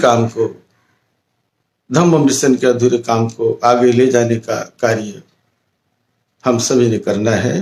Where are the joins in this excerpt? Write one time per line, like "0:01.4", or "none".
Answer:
none